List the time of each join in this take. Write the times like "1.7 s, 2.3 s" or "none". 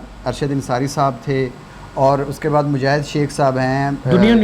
1.7 s